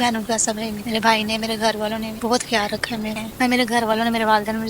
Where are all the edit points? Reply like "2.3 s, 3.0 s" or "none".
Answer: 3.1 s